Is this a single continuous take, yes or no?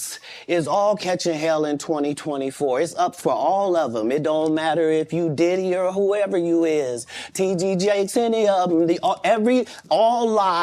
yes